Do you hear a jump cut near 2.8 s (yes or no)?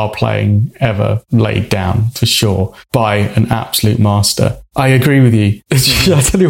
no